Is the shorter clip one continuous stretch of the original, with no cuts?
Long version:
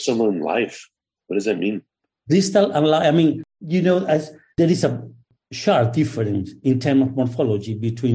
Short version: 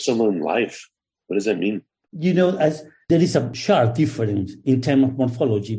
no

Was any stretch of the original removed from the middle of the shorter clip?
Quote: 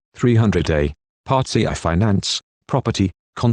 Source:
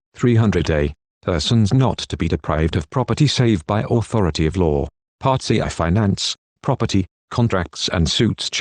yes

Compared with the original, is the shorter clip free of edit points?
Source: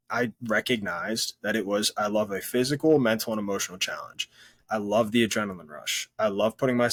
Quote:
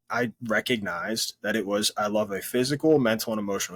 yes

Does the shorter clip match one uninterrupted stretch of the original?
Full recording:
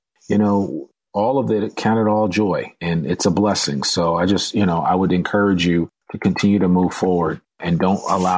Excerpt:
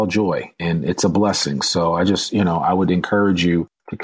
yes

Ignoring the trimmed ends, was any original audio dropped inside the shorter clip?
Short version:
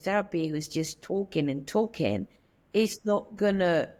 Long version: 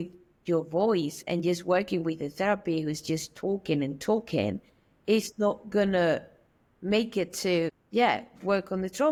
no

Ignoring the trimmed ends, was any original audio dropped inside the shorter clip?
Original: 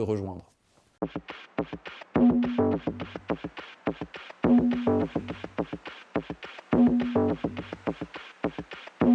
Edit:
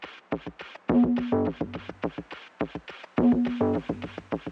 no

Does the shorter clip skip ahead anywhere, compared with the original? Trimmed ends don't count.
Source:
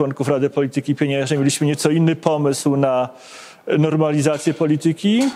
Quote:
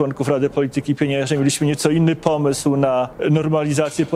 yes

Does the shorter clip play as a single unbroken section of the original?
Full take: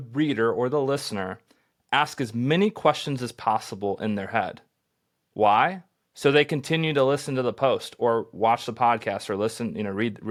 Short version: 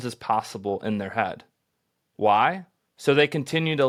yes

